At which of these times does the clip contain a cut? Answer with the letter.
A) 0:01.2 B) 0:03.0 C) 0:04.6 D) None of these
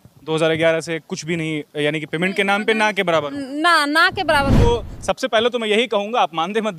C